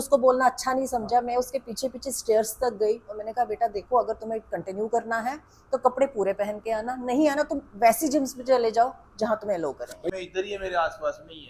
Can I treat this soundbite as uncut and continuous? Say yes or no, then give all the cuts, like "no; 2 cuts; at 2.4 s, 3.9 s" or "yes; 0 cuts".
no; 1 cut; at 10.1 s